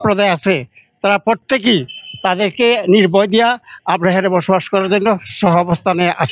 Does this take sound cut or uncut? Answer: uncut